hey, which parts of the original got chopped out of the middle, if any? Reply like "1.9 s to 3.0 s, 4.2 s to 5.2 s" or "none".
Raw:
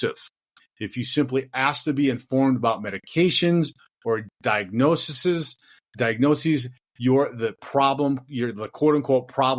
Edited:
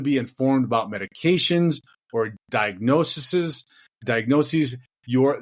none